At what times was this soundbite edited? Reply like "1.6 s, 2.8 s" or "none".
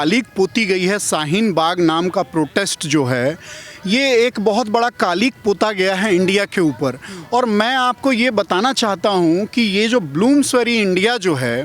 none